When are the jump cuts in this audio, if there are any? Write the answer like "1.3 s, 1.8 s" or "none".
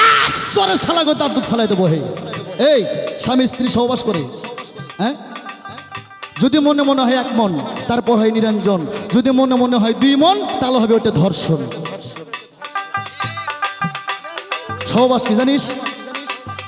none